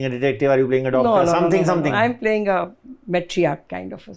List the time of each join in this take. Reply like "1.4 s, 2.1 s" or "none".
2.9 s